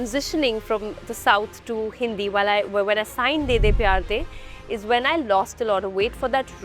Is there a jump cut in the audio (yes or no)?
no